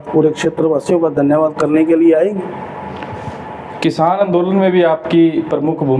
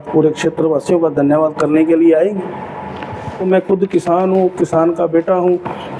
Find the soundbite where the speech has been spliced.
second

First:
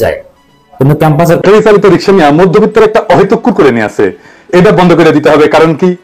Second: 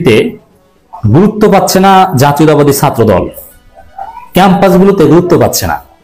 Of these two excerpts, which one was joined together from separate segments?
first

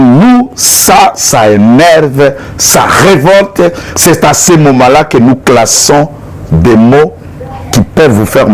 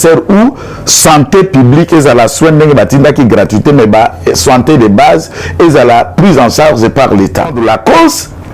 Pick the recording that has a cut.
second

